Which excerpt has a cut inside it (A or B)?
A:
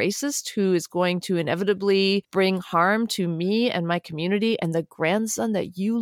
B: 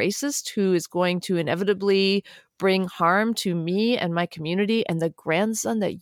A